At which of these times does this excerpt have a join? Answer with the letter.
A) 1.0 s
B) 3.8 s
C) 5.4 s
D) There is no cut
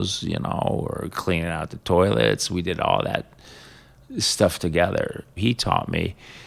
C